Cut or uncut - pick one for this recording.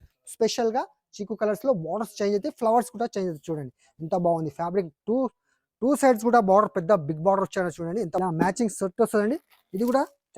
cut